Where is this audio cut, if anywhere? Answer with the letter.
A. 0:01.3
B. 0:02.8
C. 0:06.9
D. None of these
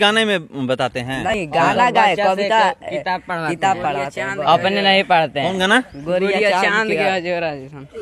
A